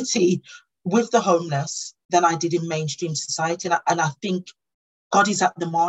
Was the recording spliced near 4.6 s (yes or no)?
yes